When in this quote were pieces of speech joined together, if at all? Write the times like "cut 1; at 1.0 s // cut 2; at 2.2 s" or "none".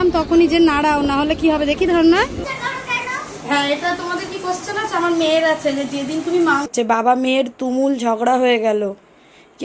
cut 1; at 2.4 s // cut 2; at 6.7 s